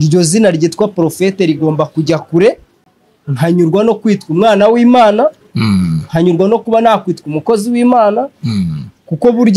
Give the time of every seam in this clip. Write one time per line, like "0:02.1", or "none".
none